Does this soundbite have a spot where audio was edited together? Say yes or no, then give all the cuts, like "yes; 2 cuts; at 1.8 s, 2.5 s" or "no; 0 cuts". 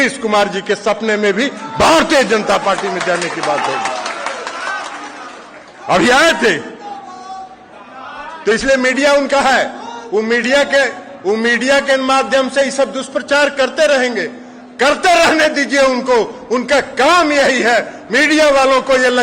no; 0 cuts